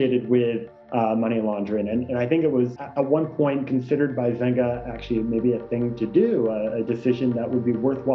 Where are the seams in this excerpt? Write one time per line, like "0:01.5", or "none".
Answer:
none